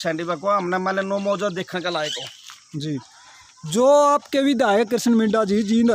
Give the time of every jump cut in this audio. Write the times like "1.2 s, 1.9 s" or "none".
none